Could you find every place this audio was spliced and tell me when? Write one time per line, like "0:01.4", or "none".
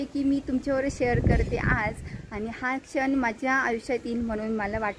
none